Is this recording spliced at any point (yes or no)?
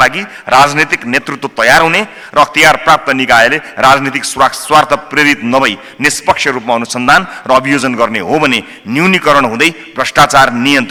no